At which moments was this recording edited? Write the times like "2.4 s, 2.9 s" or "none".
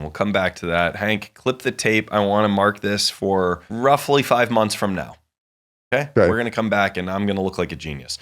3.7 s